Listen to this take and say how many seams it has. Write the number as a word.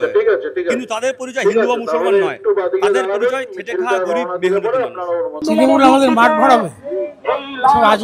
one